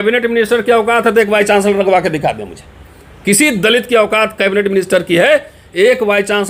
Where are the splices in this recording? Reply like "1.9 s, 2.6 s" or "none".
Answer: none